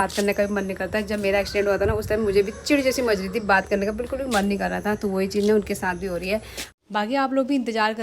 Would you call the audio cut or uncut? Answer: cut